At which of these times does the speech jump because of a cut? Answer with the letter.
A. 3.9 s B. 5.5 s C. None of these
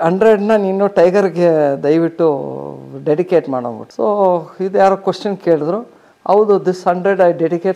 C